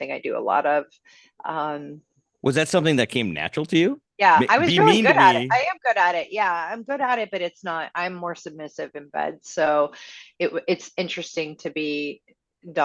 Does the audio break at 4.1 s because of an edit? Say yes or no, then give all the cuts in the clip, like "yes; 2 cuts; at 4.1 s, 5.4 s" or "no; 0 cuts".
yes; 1 cut; at 4.1 s